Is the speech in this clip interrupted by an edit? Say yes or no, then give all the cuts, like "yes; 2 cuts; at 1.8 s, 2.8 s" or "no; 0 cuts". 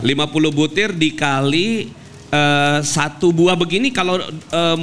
no; 0 cuts